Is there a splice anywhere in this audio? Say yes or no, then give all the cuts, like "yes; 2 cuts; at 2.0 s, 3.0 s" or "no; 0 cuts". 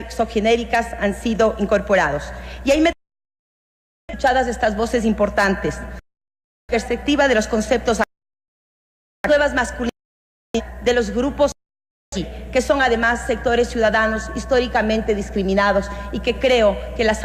yes; 1 cut; at 7.5 s